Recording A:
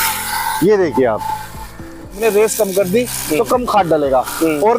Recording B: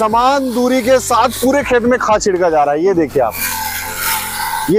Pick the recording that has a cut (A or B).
A